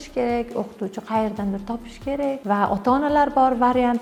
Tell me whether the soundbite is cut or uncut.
uncut